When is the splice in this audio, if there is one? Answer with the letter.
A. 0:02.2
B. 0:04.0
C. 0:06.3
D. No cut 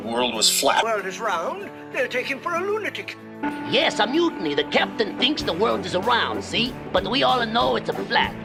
D